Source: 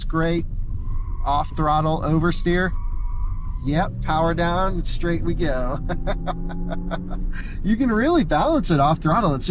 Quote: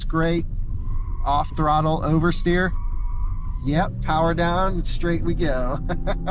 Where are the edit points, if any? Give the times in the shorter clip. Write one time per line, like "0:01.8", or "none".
none